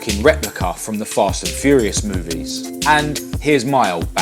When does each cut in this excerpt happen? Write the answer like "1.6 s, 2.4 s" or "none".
2.7 s